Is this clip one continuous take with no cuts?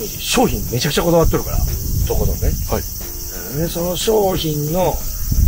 yes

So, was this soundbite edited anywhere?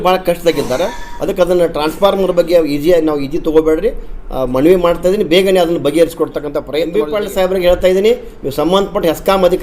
yes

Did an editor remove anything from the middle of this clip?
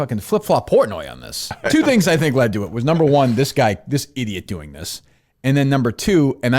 yes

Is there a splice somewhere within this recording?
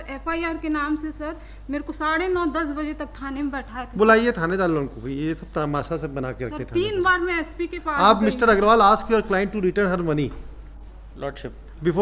no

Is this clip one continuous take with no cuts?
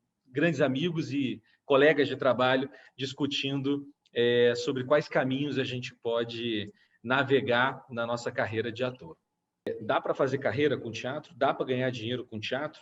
no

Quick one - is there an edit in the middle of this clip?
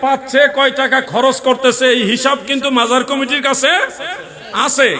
no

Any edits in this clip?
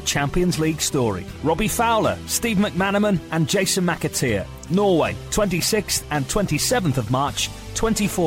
no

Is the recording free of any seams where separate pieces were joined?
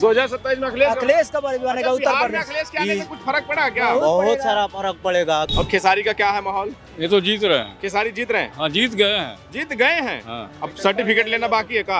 no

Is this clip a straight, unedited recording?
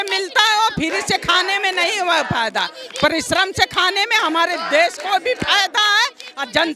yes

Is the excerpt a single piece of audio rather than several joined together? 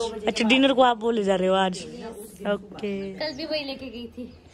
yes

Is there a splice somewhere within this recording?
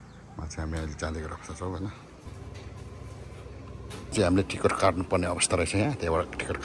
yes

